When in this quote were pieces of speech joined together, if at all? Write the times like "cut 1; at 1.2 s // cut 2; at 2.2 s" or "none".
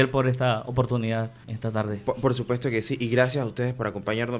cut 1; at 1.4 s